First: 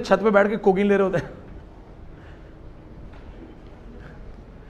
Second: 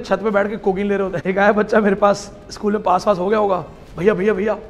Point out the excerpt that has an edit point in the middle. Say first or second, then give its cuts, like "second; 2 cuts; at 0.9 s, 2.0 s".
second; 1 cut; at 1.2 s